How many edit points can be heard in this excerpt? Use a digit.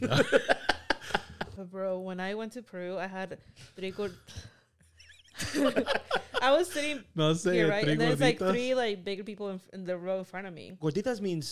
1